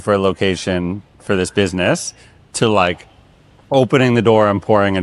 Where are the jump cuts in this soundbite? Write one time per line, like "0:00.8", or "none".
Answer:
none